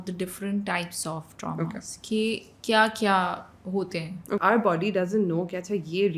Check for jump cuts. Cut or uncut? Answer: cut